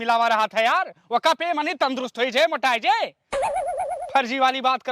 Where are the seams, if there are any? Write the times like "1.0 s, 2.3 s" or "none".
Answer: 3.1 s, 4.1 s